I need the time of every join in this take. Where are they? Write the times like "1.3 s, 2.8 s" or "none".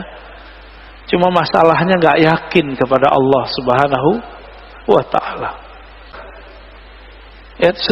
6.1 s

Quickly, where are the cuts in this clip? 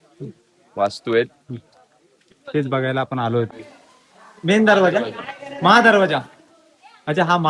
3.5 s

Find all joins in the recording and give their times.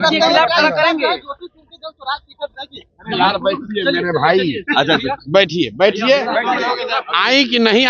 none

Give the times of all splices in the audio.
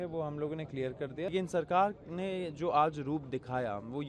1.3 s

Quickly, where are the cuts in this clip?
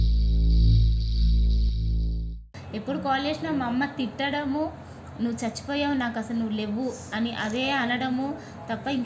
2.6 s

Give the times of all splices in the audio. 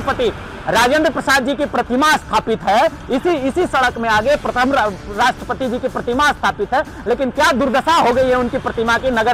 none

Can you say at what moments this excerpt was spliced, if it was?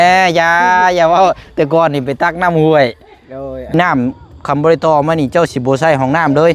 3.7 s

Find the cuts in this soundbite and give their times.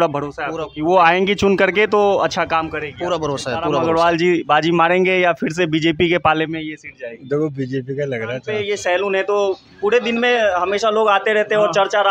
3.8 s, 8.5 s

